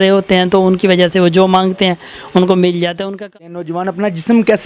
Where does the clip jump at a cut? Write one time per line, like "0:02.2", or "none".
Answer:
0:03.3